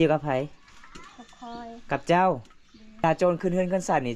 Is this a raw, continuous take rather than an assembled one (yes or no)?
no